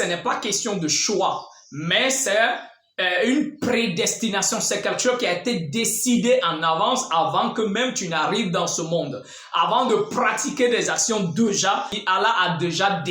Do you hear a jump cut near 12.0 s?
yes; 1 cut; at 12.0 s

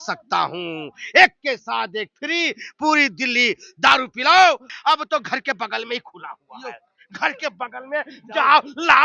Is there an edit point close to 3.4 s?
no; 1 cut; at 4.7 s

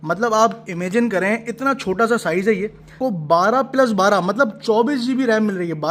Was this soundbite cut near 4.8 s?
no; 1 cut; at 3.0 s

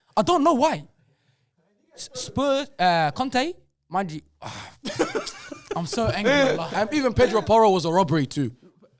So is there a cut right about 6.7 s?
yes; 1 cut; at 6.7 s

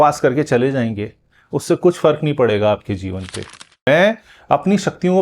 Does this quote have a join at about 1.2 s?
no; 1 cut; at 3.5 s

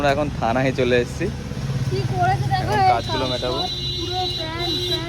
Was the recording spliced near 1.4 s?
yes; 1 cut; at 1.4 s

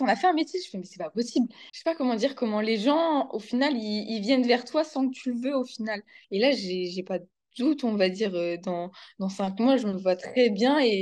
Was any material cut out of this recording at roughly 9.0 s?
no; 2 cuts; at 1.7 s, 6.2 s

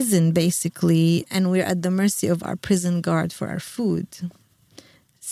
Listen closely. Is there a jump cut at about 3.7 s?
no; 1 cut; at 1.3 s

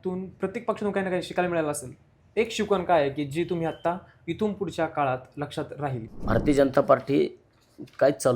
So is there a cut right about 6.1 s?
yes; 1 cut; at 6.1 s

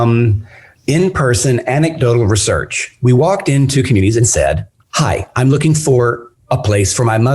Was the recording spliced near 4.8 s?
yes; 1 cut; at 4.8 s

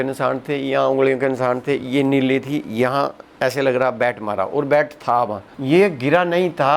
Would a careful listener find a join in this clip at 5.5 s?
yes; 1 cut; at 5.5 s

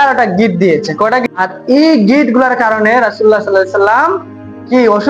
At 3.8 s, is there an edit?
no; 1 cut; at 1.2 s

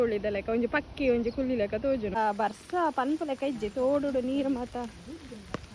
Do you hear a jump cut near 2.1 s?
yes; 1 cut; at 2.1 s

